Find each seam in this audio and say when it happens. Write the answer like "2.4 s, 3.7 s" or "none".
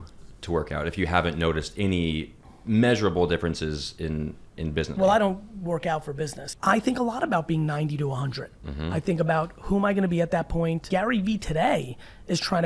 4.9 s, 6.4 s, 10.8 s